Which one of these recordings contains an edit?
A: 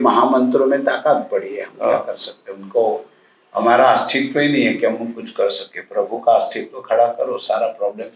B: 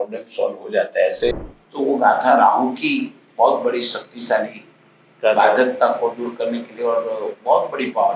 B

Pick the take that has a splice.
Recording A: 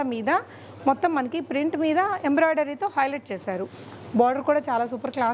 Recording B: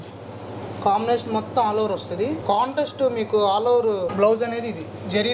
B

